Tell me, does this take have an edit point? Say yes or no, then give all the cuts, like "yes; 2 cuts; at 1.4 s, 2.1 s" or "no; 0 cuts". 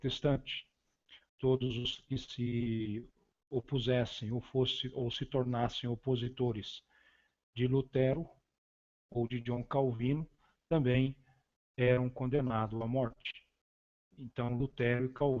no; 0 cuts